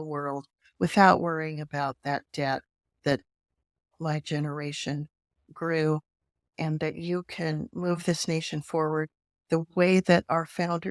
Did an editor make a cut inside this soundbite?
yes; 1 cut; at 6.5 s

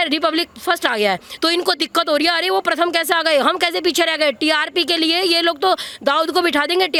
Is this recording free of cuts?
yes; 0 cuts

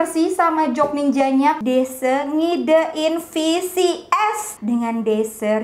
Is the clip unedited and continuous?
no; 2 cuts; at 1.6 s, 4.5 s

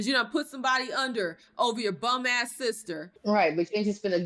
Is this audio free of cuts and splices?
yes; 0 cuts

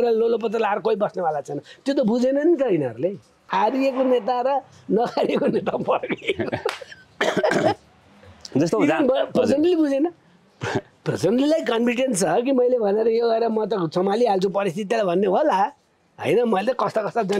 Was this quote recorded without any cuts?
no; 1 cut; at 3.4 s

